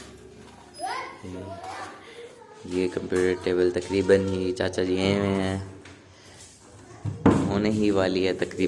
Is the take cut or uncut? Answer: uncut